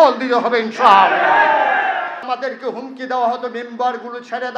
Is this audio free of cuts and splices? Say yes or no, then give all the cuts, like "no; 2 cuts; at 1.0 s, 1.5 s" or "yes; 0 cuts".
no; 1 cut; at 2.3 s